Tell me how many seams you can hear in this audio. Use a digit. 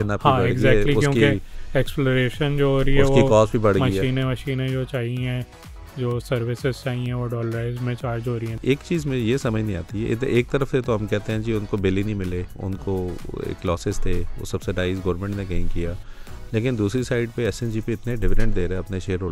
1